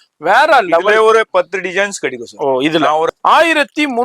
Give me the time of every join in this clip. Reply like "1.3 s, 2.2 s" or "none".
3.1 s